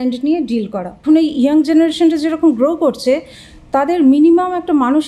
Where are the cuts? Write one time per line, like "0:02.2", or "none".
0:00.9